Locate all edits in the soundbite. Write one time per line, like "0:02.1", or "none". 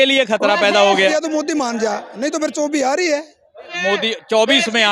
0:01.1
0:03.8